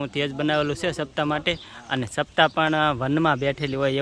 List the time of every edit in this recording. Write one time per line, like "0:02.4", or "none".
none